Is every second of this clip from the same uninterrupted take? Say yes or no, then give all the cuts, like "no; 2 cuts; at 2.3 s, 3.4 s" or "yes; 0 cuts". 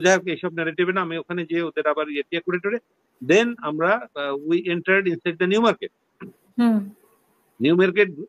yes; 0 cuts